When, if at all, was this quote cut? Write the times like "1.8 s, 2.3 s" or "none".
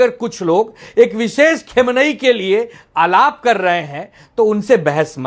none